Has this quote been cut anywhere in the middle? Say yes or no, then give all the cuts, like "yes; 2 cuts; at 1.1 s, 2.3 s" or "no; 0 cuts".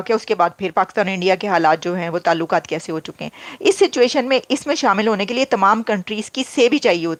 no; 0 cuts